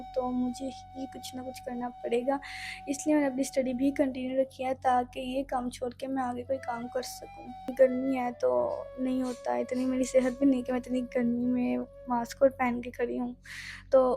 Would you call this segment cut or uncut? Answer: cut